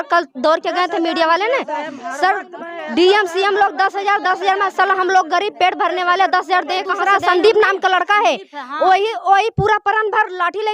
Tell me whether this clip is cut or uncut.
cut